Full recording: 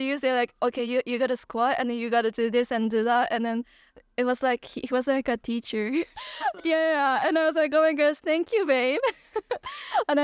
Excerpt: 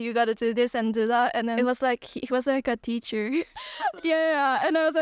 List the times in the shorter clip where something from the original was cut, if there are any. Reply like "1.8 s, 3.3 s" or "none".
1.6 s